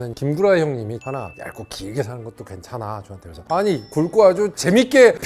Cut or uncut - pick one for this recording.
cut